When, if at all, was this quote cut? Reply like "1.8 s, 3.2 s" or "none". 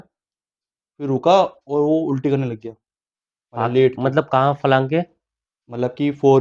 none